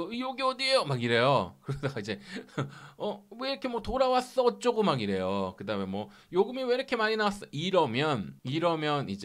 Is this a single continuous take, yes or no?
yes